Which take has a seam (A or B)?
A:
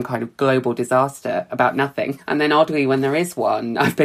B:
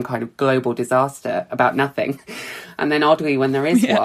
A